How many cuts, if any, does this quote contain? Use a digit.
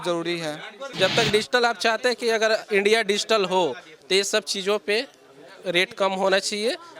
1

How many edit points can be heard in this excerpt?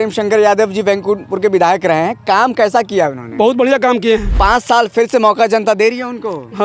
1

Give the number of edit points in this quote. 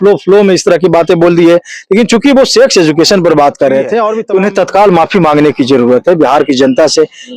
1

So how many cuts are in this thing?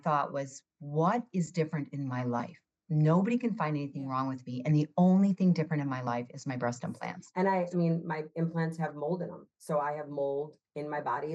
1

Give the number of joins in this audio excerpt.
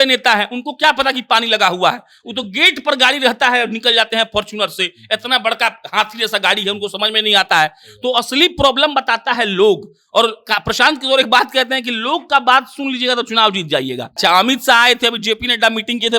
1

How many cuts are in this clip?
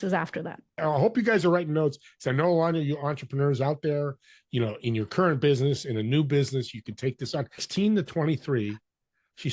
2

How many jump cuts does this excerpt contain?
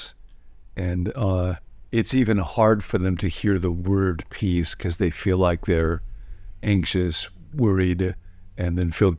0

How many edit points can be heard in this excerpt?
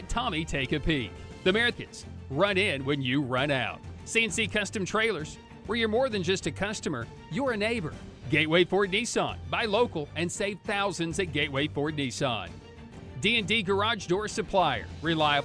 1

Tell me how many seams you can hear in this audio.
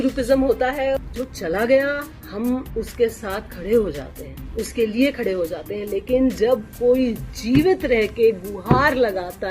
1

